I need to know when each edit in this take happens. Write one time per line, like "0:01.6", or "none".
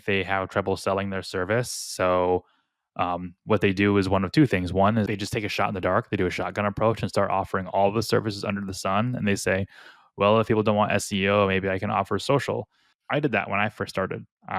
0:05.1
0:12.9